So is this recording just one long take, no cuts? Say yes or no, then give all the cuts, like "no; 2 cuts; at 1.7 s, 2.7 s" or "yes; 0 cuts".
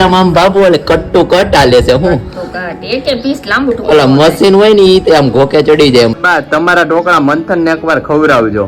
no; 1 cut; at 6.1 s